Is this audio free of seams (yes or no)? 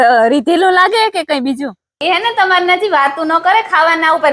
no